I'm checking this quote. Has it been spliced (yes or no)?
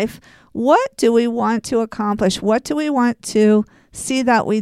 no